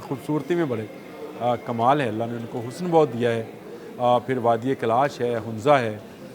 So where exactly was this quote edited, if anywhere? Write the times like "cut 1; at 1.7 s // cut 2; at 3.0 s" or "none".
none